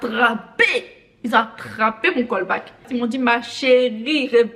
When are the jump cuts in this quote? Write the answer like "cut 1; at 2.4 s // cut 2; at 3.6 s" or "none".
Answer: none